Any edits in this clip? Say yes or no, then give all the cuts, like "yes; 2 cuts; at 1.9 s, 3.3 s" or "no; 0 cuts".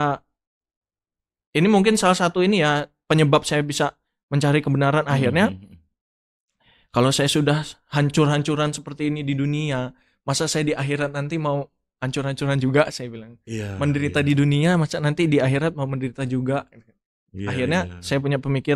no; 0 cuts